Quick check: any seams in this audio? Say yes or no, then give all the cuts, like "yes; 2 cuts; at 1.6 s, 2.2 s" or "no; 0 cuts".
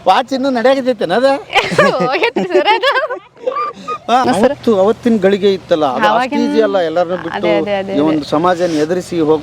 yes; 1 cut; at 4.2 s